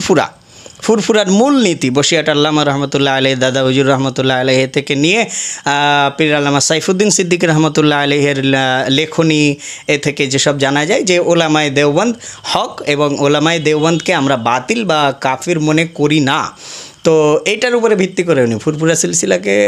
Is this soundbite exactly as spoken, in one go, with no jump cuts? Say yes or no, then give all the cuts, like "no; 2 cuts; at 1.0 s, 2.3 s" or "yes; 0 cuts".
yes; 0 cuts